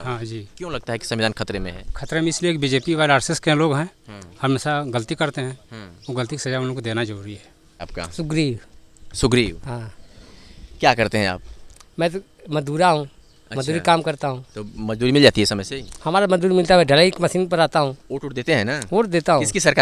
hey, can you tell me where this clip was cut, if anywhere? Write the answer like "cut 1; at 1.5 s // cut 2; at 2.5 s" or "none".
cut 1; at 7.9 s